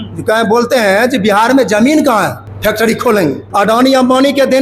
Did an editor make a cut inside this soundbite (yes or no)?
yes